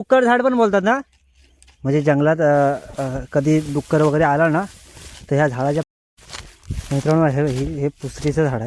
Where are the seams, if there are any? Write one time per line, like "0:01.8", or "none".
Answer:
0:05.8